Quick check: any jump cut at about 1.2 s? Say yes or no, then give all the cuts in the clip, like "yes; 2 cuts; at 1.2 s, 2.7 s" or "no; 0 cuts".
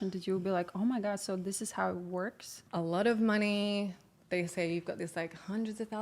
no; 1 cut; at 2.6 s